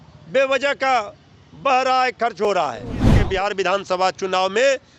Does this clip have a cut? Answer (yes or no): yes